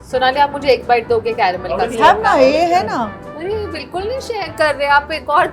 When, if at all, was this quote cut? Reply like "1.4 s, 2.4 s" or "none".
none

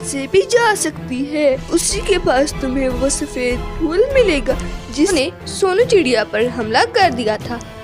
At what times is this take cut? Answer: 1.6 s, 5.1 s

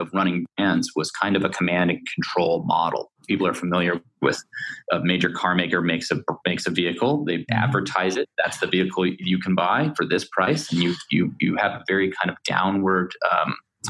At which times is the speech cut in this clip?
3.1 s, 4.7 s

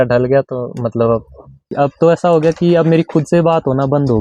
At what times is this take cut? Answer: 1.7 s

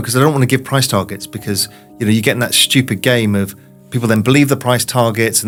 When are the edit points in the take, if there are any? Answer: none

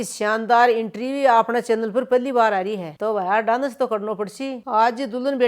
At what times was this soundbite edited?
none

